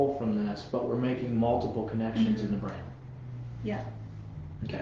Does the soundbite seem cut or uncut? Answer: uncut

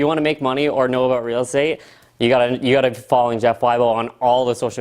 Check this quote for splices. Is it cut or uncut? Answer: uncut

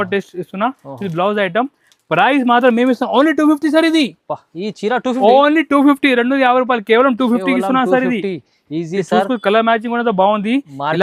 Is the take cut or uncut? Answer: uncut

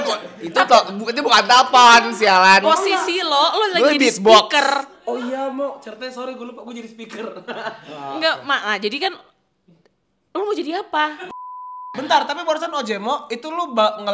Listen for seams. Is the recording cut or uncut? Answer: cut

